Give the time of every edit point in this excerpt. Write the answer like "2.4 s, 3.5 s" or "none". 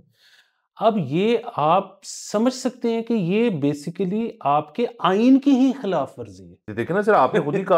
6.7 s